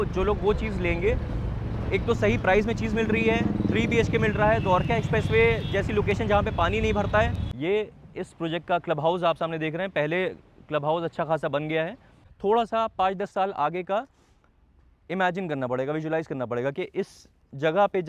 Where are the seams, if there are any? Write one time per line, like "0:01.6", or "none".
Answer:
0:07.4
0:12.2